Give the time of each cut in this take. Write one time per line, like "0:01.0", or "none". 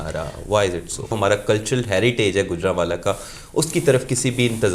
0:01.2